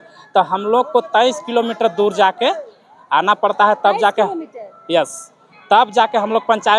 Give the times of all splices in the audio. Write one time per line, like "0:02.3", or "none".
none